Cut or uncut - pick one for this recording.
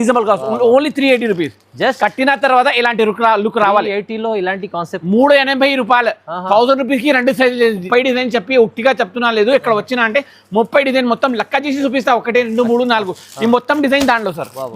cut